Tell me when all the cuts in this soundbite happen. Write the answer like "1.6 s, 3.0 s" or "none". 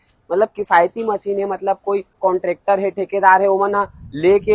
2.2 s